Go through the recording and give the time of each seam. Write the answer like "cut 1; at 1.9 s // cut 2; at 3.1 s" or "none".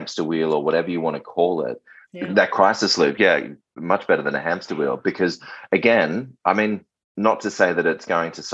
none